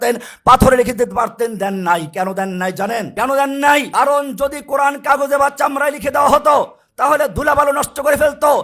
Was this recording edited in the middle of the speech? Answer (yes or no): yes